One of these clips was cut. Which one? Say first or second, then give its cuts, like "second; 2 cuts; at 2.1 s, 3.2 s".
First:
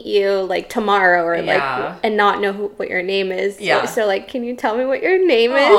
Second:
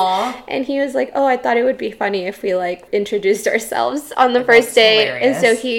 second; 1 cut; at 2.8 s